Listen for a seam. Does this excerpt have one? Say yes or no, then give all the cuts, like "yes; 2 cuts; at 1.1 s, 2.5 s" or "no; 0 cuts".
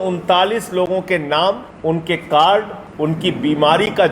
yes; 2 cuts; at 1.7 s, 2.8 s